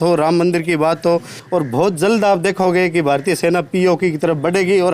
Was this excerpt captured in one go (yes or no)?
no